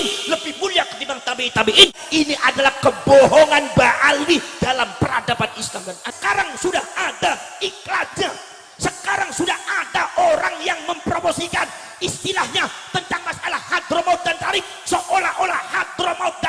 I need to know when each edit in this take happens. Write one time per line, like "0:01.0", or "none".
0:02.0
0:06.1